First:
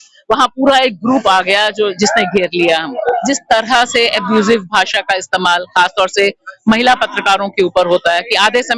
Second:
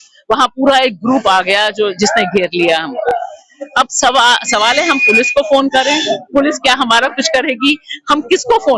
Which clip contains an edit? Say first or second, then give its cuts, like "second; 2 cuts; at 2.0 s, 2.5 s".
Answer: first; 1 cut; at 3.1 s